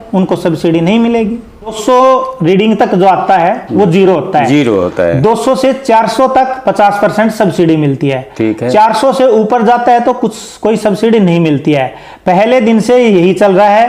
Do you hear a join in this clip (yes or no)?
yes